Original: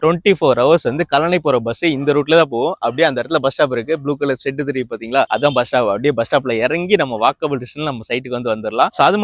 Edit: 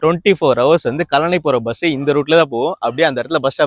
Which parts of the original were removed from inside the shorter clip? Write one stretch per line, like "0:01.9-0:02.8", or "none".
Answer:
none